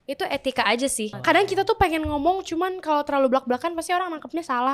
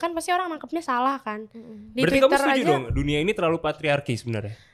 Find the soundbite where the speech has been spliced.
first; 1 cut; at 1.1 s

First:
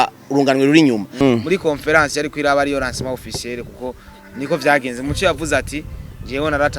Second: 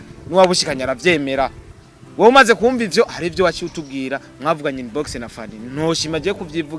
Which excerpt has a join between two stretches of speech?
first; 1 cut; at 1.1 s

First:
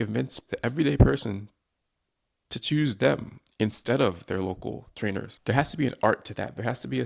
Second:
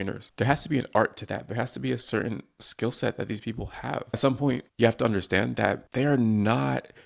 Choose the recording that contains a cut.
second; 1 cut; at 4.1 s

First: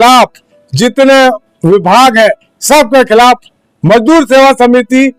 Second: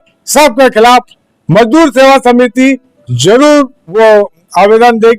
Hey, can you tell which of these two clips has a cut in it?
second; 1 cut; at 3.9 s

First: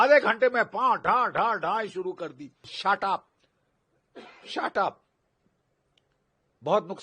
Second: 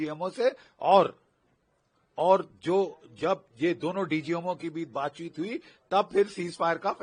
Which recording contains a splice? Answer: first; 1 cut; at 2.7 s

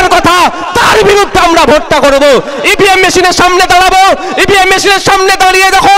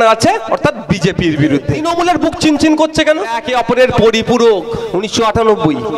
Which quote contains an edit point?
second; 3 cuts; at 1.8 s, 3.5 s, 4.8 s

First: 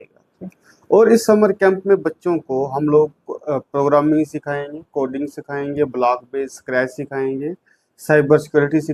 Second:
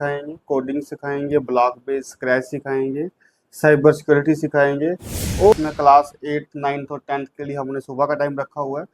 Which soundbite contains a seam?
second; 1 cut; at 5.5 s

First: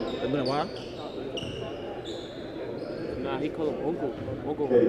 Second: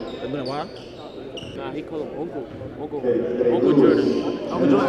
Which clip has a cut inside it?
second; 1 cut; at 1.5 s

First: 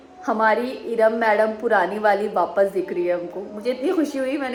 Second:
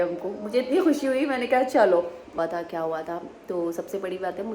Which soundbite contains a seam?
second; 1 cut; at 2.4 s

